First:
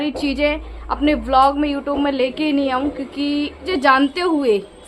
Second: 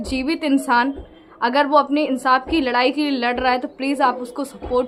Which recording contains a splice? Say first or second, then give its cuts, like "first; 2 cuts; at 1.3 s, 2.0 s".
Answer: first; 1 cut; at 3.6 s